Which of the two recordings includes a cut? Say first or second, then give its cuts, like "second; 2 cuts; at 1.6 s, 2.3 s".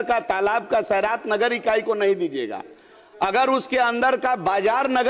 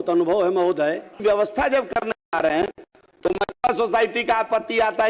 second; 1 cut; at 1.1 s